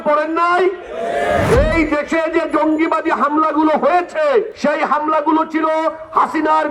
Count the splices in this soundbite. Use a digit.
2